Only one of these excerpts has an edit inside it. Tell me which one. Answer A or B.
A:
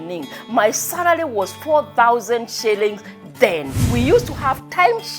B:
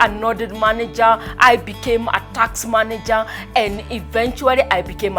A